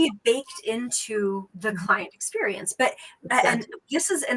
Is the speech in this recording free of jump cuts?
no; 1 cut; at 1.5 s

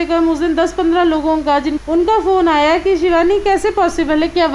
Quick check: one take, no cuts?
no; 1 cut; at 1.8 s

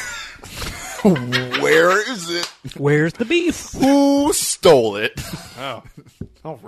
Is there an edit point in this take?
no; 0 cuts

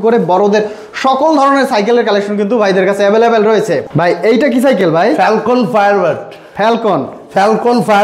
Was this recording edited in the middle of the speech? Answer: no; 0 cuts

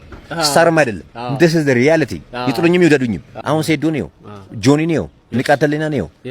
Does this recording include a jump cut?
yes; 1 cut; at 3.3 s

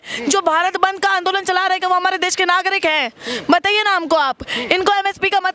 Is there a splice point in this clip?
no; 0 cuts

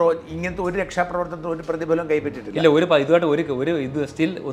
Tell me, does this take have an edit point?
no; 0 cuts

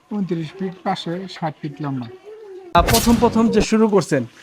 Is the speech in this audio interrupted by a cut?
yes; 1 cut; at 2.7 s

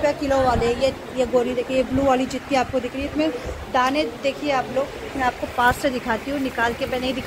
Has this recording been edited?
no; 0 cuts

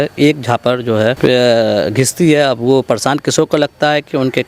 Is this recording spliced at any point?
yes; 1 cut; at 1.2 s

